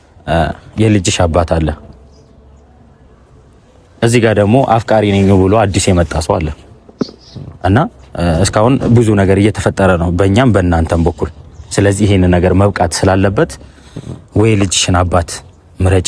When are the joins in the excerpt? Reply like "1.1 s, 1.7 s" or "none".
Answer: none